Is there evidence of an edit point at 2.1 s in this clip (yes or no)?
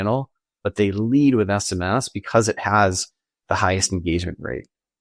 yes